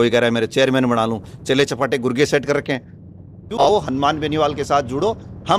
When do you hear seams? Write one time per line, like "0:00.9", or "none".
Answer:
0:03.7